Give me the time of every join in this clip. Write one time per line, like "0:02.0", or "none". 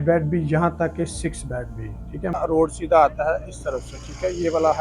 0:02.4